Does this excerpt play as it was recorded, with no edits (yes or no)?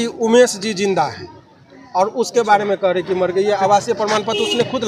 yes